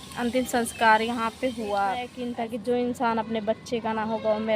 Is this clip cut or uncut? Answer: cut